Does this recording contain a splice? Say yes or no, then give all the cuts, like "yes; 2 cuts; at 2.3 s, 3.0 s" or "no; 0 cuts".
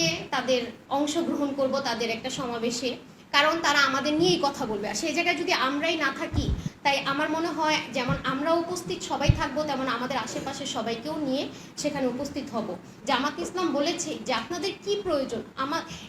yes; 2 cuts; at 6.6 s, 12.9 s